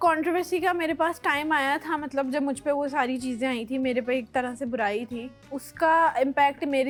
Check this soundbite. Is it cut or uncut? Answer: uncut